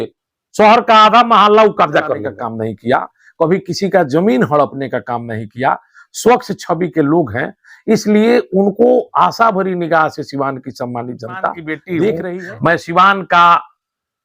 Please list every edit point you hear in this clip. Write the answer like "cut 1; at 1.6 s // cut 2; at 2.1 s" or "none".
cut 1; at 2.3 s // cut 2; at 12.2 s